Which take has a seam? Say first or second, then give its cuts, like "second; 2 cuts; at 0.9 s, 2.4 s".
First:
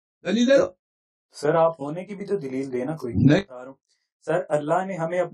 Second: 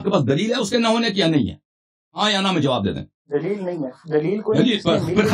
first; 1 cut; at 3.6 s